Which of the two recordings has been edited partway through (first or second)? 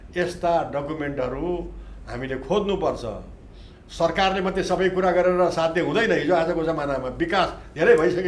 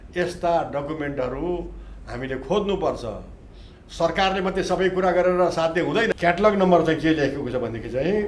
second